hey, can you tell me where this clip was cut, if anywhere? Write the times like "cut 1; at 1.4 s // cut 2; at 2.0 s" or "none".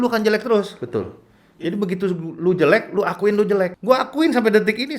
cut 1; at 3.8 s

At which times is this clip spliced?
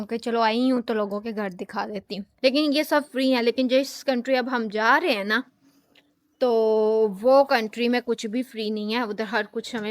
cut 1; at 2.3 s

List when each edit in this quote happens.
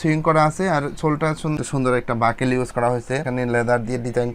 cut 1; at 1.6 s // cut 2; at 3.3 s

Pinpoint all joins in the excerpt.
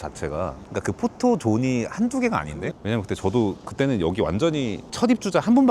cut 1; at 2.7 s

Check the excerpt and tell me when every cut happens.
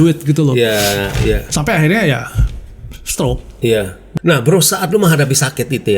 cut 1; at 4.0 s

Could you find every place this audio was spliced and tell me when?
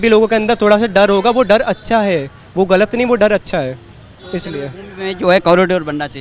none

